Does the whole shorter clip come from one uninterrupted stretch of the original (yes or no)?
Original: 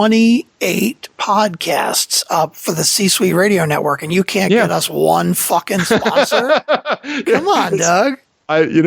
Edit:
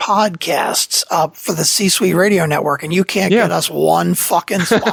yes